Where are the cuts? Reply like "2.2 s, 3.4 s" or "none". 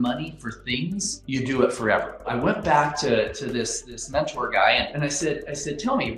2.3 s, 4.9 s